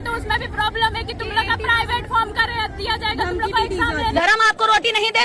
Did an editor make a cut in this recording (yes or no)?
yes